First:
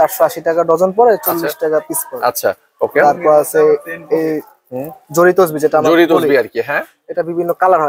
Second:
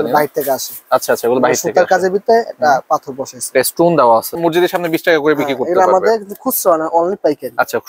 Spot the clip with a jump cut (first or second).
second